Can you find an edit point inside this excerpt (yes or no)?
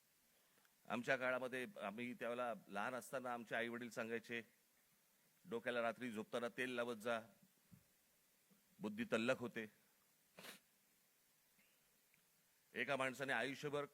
no